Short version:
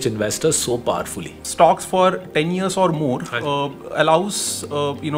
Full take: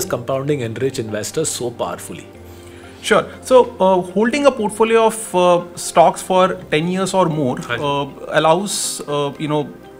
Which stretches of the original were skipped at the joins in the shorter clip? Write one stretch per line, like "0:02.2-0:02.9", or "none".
0:02.3-0:05.8